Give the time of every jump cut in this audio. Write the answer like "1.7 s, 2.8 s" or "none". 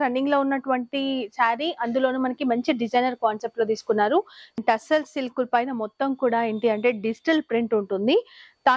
4.6 s